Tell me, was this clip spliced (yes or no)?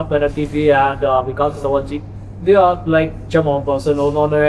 no